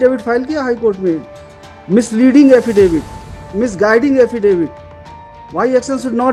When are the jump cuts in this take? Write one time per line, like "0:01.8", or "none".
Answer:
none